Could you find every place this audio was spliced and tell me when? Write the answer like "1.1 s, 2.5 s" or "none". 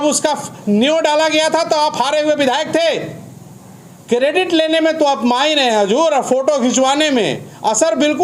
none